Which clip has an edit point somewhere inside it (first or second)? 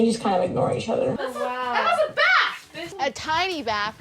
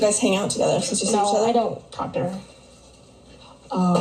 first